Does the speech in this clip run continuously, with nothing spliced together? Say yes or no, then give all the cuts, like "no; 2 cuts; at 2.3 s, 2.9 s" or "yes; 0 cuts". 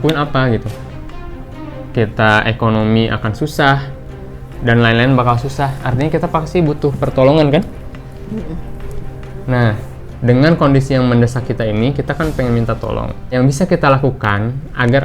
no; 1 cut; at 13.3 s